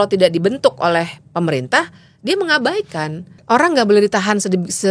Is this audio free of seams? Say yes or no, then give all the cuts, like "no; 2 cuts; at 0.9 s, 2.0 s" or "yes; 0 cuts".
no; 1 cut; at 3.3 s